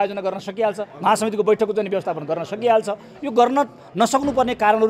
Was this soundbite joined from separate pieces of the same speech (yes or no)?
no